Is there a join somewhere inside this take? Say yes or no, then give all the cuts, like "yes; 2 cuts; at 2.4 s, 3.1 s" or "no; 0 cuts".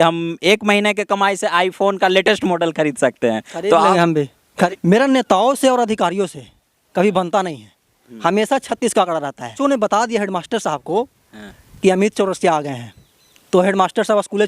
yes; 2 cuts; at 4.7 s, 9.5 s